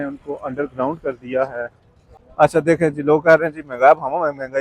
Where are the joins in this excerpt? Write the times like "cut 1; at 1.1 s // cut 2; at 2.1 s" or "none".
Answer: cut 1; at 2.2 s

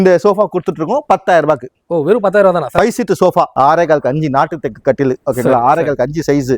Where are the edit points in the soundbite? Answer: cut 1; at 3.5 s

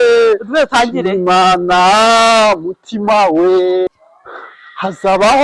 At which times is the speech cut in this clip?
cut 1; at 3.9 s

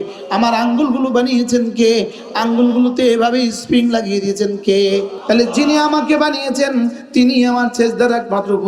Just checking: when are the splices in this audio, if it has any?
cut 1; at 5.1 s

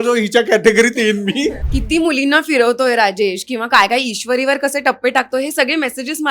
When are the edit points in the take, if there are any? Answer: cut 1; at 1.7 s

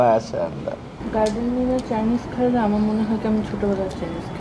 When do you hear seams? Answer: cut 1; at 0.9 s

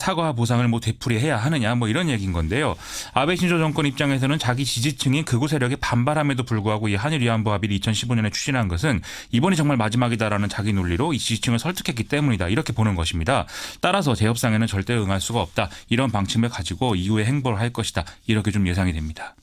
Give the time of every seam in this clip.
cut 1; at 17.9 s

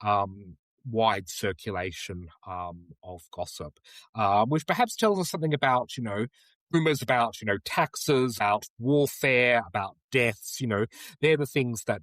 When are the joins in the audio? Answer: cut 1; at 6.7 s // cut 2; at 8.4 s

